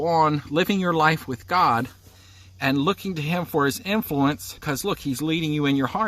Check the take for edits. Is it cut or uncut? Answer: cut